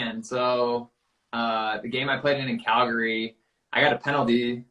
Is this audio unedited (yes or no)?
yes